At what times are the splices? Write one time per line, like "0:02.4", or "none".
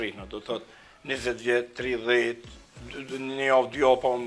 none